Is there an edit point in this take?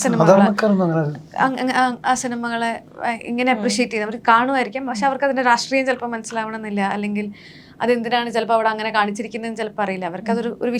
no; 0 cuts

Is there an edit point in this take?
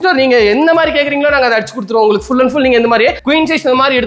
yes; 1 cut; at 3.2 s

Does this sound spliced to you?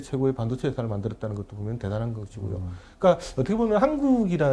no; 0 cuts

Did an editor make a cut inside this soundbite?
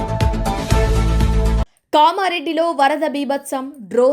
yes; 1 cut; at 1.6 s

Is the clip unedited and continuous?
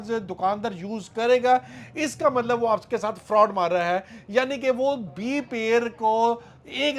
yes; 0 cuts

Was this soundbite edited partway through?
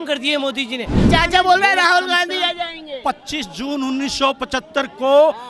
yes; 1 cut; at 1.1 s

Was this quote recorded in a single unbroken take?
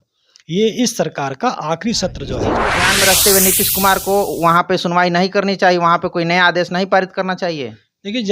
no; 1 cut; at 2.7 s

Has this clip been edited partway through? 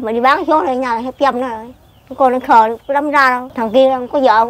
yes; 1 cut; at 3.5 s

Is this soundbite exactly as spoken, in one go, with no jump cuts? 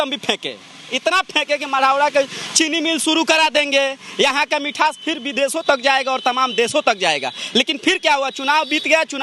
yes; 0 cuts

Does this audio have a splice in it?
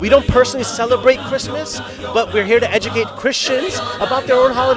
no; 0 cuts

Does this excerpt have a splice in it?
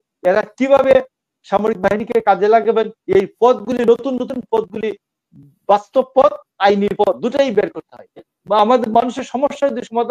yes; 1 cut; at 8.3 s

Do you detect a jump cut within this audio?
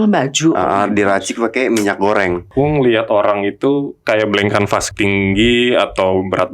yes; 2 cuts; at 2.5 s, 4.9 s

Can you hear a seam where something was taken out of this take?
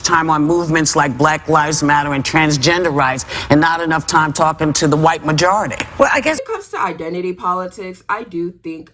yes; 1 cut; at 6.4 s

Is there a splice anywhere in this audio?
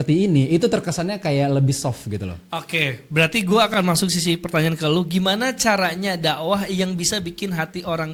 no; 0 cuts

